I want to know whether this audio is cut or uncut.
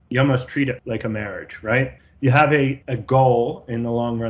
cut